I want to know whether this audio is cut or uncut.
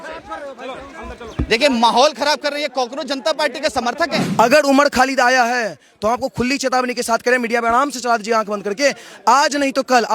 cut